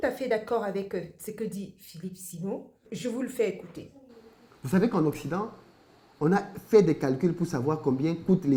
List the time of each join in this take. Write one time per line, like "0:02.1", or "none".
none